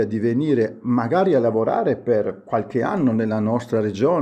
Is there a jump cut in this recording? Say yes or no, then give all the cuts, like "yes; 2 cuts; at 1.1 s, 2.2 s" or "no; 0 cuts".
no; 0 cuts